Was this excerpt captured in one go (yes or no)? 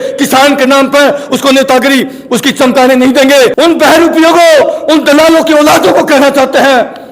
no